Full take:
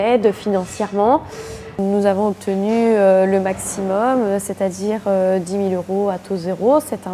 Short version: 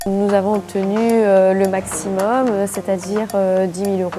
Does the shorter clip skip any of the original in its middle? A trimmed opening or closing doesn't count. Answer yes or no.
no